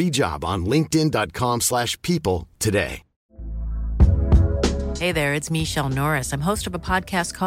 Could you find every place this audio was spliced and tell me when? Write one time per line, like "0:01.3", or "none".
0:03.1